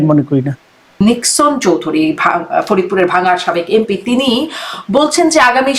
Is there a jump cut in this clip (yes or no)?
yes